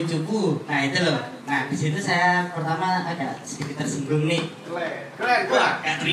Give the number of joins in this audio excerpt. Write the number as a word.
zero